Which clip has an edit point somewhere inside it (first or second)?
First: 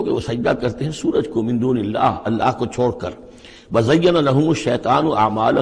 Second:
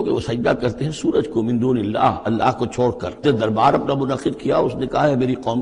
second